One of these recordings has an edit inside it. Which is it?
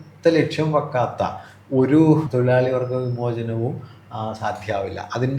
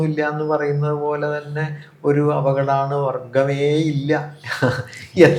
first; 1 cut; at 2.3 s

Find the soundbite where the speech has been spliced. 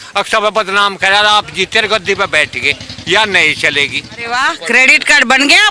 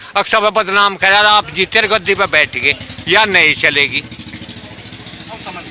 first; 1 cut; at 4.1 s

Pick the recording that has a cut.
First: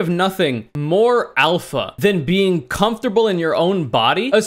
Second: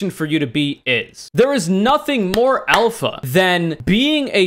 second; 1 cut; at 1.2 s

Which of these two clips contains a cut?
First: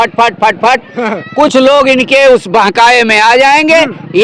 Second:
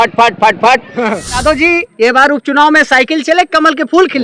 second; 1 cut; at 1.4 s

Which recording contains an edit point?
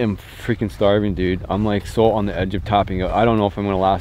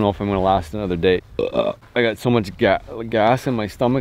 second; 1 cut; at 1.5 s

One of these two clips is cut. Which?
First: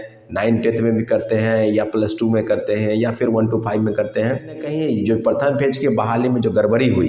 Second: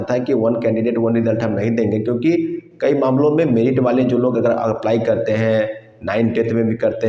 first; 1 cut; at 4.7 s

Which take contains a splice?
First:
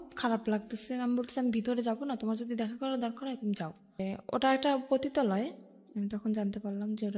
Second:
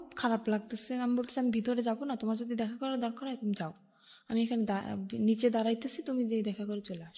first; 1 cut; at 4.1 s

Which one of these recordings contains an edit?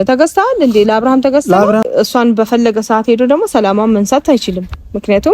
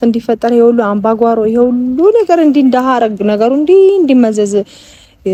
first; 1 cut; at 1.9 s

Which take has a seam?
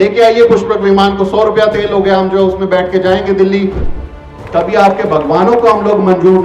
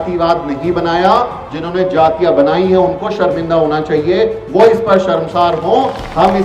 first; 1 cut; at 4.2 s

